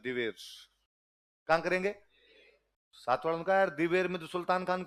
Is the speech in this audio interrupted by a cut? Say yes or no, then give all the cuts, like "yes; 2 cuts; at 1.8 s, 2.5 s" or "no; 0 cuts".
no; 0 cuts